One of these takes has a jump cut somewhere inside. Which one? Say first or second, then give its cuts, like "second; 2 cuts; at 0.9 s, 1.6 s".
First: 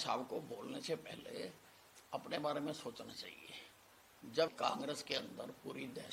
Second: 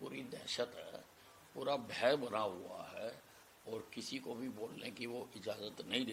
first; 1 cut; at 4.5 s